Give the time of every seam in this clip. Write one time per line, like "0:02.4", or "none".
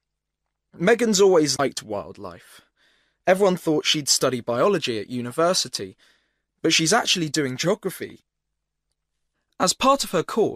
0:01.6